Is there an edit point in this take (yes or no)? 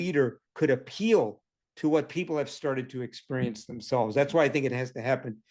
no